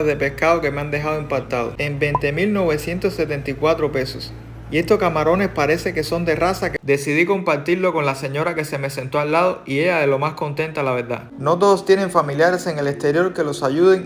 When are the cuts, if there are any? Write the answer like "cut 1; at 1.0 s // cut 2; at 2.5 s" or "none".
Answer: cut 1; at 1.8 s // cut 2; at 6.7 s // cut 3; at 11.3 s